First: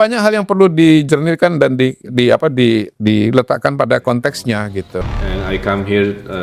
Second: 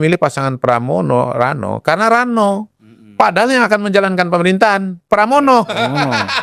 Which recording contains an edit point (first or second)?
first